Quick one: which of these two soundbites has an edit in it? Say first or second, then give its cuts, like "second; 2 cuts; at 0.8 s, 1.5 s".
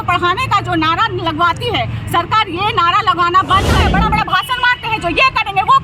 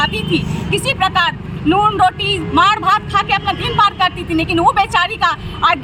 first; 1 cut; at 3.8 s